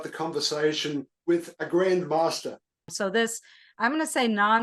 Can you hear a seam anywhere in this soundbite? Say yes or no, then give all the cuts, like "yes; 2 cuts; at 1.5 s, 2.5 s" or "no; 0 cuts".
yes; 1 cut; at 2.9 s